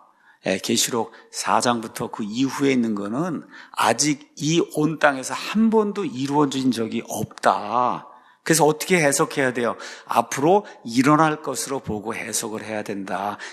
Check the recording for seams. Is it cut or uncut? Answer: uncut